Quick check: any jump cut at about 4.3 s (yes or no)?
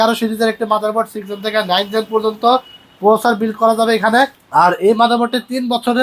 no